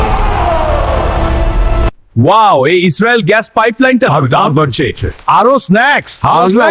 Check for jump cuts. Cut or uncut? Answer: cut